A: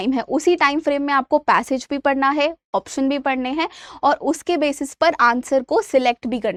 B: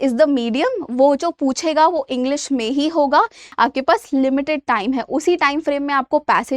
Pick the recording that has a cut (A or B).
B